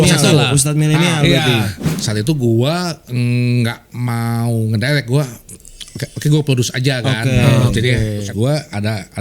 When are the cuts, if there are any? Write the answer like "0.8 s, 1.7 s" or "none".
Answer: 2.0 s, 8.2 s